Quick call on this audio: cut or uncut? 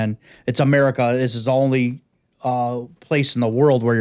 uncut